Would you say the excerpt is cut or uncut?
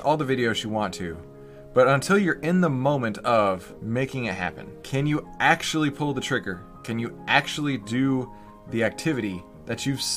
cut